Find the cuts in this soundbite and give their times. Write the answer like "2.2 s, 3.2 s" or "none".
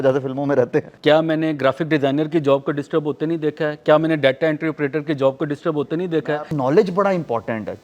0.9 s, 6.2 s